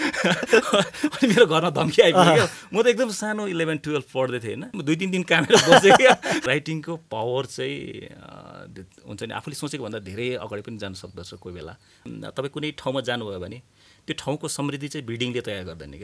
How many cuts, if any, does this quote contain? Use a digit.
3